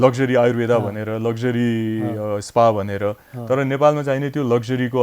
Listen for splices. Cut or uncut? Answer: uncut